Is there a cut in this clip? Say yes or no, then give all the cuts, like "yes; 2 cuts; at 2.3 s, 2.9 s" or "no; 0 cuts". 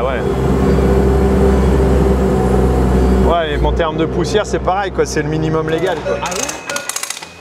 yes; 1 cut; at 6.2 s